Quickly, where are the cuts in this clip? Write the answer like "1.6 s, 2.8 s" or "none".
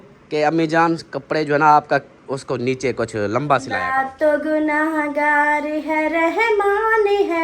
3.8 s